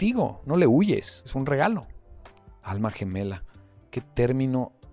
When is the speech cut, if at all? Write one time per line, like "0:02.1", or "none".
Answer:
0:01.2